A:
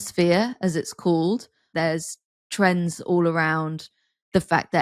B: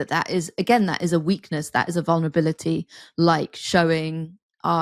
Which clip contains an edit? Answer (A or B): A